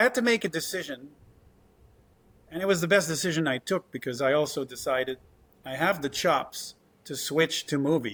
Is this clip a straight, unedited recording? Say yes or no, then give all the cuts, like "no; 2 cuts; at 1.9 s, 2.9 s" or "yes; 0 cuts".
yes; 0 cuts